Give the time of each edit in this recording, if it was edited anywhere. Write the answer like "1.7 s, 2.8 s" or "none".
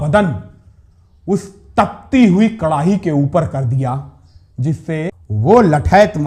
5.1 s